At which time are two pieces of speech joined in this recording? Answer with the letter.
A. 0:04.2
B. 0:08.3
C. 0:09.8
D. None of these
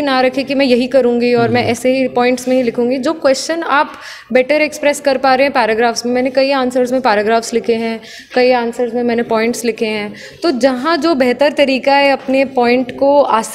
D